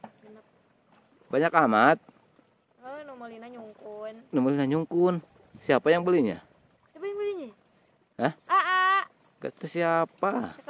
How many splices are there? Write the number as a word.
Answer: zero